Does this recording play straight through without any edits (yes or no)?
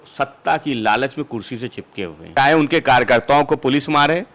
no